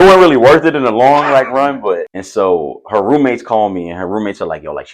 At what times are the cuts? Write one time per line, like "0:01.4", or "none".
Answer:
0:02.2

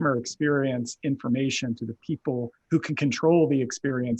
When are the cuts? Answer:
none

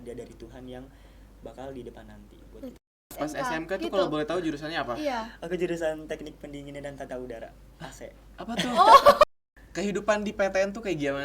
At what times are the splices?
0:03.1
0:09.2

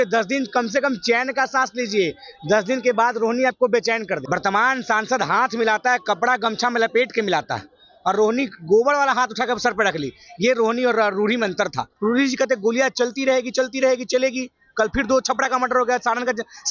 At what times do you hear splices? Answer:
0:04.2
0:12.0

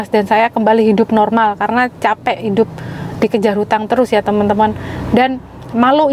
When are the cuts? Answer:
none

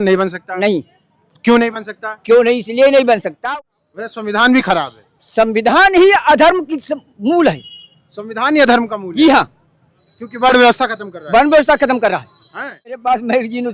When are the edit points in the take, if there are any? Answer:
0:03.3
0:12.9

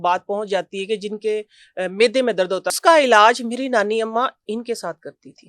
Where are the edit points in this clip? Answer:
0:02.7

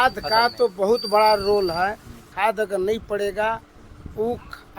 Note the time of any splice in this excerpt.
0:02.3

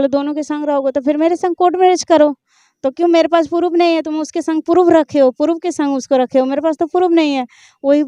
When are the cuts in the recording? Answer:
none

